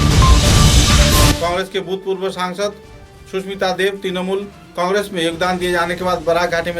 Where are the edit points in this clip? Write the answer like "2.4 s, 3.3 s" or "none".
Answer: 1.3 s